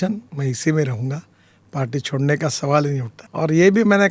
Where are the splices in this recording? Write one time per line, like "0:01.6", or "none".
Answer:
0:03.2